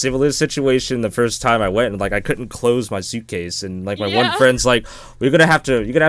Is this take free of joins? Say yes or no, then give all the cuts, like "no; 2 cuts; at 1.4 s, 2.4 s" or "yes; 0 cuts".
yes; 0 cuts